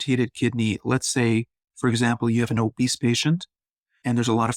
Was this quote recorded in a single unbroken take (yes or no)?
yes